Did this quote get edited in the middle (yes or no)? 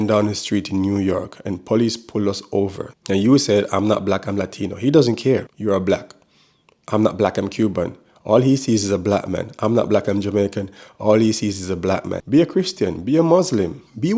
yes